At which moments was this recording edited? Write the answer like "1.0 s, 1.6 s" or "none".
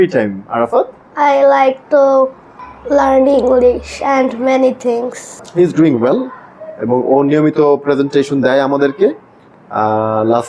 5.4 s